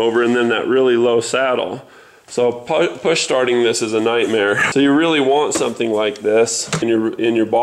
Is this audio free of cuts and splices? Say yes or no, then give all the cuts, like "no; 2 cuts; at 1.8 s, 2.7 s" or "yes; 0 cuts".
yes; 0 cuts